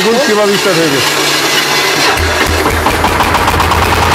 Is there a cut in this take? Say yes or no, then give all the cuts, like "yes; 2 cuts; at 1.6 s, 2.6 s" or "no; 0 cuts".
no; 0 cuts